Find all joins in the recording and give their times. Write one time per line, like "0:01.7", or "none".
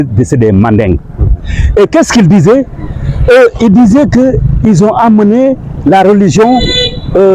none